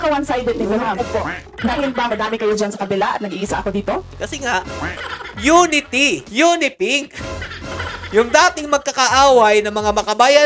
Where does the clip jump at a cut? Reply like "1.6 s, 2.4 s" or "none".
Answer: 4.1 s